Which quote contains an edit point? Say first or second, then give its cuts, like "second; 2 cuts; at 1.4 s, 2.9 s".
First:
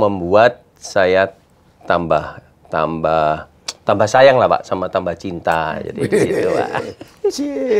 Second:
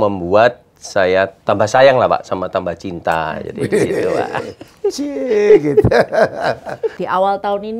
second; 2 cuts; at 1.4 s, 7.0 s